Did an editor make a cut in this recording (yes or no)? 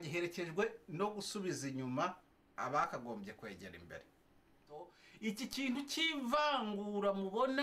yes